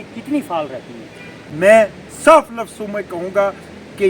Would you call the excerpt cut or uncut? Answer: cut